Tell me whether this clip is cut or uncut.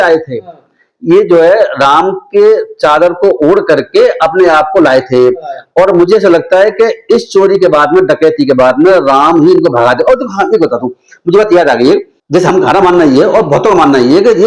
uncut